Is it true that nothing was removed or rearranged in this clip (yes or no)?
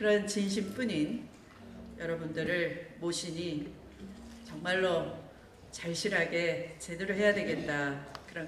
yes